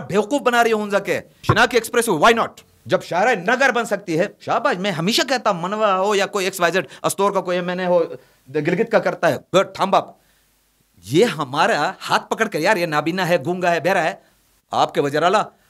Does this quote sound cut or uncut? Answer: cut